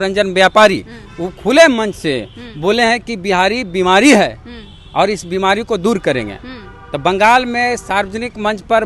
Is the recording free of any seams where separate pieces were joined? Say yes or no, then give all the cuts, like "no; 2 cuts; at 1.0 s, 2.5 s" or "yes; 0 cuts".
yes; 0 cuts